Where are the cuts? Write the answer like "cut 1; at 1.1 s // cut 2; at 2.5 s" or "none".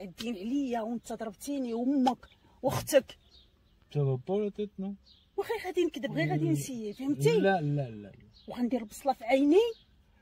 none

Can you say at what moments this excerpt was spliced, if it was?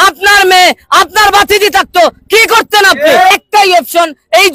cut 1; at 3.3 s

